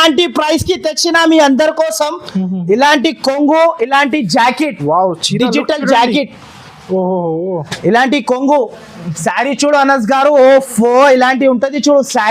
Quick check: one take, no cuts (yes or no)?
yes